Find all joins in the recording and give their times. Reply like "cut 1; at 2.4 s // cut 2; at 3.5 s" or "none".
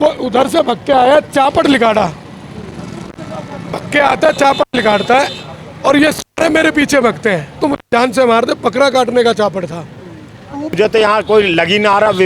cut 1; at 7.5 s // cut 2; at 10.8 s

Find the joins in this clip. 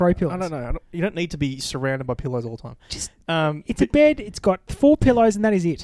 none

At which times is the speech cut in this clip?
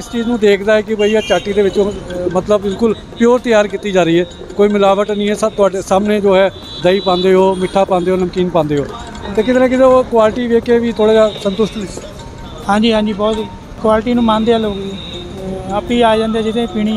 cut 1; at 13.7 s

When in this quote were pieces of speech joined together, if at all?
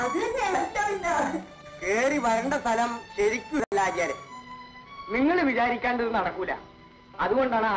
cut 1; at 3.7 s

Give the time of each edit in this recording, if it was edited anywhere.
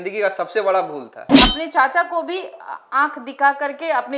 cut 1; at 1.3 s

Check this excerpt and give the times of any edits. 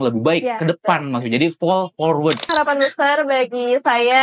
cut 1; at 2.5 s

